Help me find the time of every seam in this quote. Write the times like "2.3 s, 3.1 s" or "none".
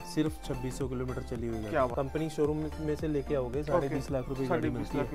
1.9 s